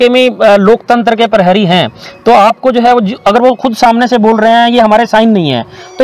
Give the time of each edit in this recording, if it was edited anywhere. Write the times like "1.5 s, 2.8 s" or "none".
none